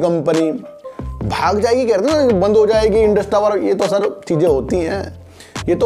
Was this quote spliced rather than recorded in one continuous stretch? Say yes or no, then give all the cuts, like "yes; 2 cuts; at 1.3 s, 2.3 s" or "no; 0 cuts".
no; 0 cuts